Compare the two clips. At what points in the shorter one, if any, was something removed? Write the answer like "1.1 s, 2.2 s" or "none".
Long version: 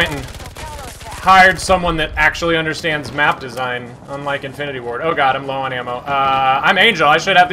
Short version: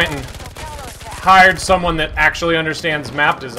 none